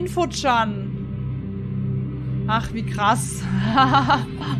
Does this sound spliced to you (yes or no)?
no